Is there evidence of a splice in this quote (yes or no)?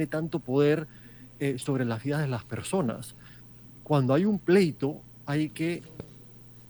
no